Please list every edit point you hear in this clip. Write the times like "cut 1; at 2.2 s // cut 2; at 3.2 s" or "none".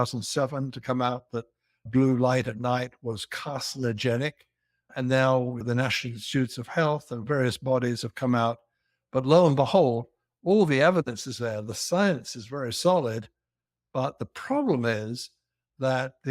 cut 1; at 1.9 s // cut 2; at 4.8 s // cut 3; at 5.6 s

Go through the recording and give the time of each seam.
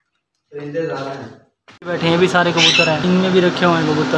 cut 1; at 1.7 s // cut 2; at 3.0 s

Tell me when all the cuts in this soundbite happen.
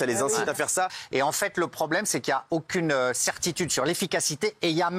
cut 1; at 1.0 s

